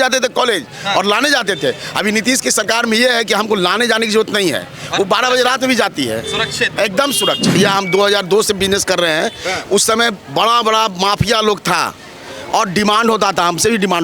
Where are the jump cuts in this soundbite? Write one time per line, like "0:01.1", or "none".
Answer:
0:07.6